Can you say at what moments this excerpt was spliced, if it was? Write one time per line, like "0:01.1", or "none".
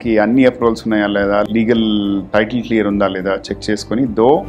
0:01.5

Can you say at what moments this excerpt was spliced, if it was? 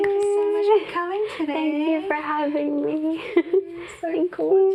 none

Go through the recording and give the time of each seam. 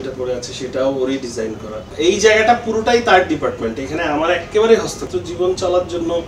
0:01.9
0:05.0

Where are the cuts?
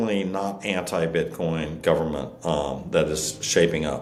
none

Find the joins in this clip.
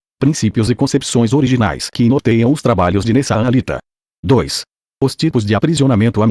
0:03.8
0:05.0

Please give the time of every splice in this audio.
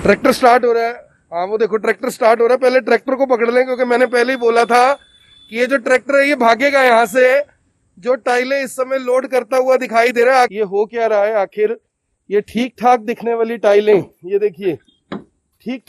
0:10.5

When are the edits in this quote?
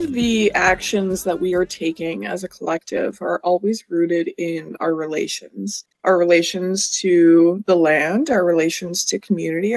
none

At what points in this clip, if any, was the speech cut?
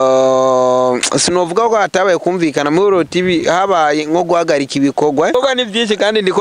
0:05.3

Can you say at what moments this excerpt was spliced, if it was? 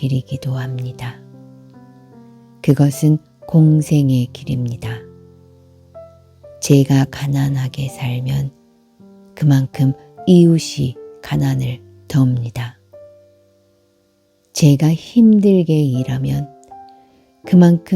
0:01.1
0:02.6
0:04.8
0:06.6

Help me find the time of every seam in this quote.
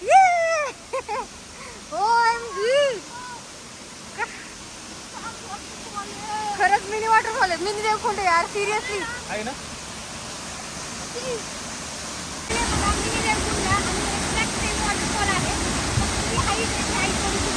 none

